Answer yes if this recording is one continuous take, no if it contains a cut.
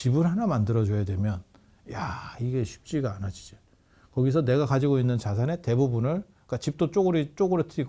yes